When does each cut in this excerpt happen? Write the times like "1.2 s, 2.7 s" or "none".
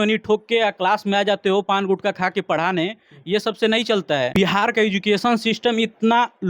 4.3 s